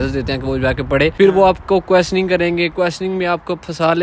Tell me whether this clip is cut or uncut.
cut